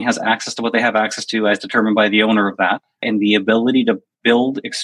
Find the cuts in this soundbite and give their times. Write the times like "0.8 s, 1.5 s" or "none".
3.0 s